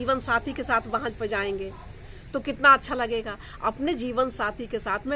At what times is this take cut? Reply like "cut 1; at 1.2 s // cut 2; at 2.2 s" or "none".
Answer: none